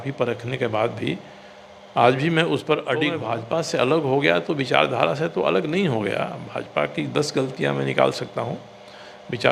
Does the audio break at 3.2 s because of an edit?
yes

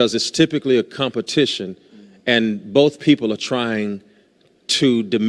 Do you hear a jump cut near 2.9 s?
no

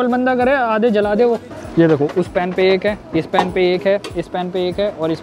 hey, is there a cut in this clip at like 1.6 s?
yes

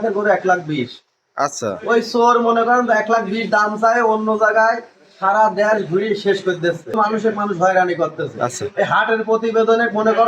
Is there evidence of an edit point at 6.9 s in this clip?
yes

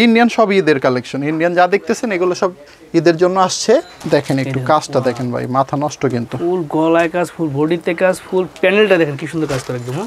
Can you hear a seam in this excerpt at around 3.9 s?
yes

